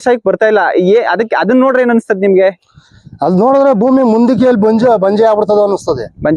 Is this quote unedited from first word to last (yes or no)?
yes